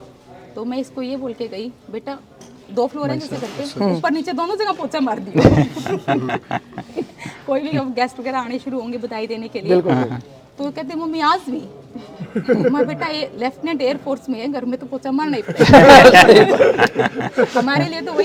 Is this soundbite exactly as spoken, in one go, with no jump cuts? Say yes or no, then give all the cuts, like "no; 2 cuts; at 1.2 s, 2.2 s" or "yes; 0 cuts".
yes; 0 cuts